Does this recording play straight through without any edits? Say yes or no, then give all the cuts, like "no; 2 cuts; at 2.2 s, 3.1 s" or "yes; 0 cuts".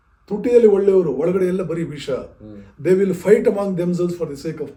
yes; 0 cuts